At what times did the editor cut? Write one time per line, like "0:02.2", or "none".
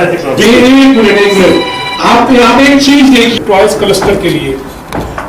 0:03.4